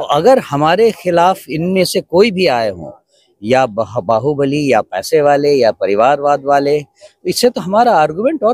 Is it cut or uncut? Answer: uncut